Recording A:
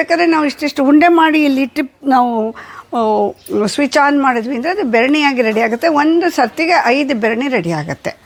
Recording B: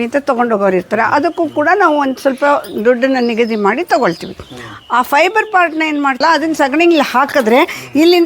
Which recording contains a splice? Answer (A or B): B